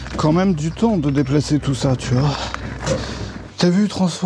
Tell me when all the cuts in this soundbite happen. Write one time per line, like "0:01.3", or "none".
0:03.2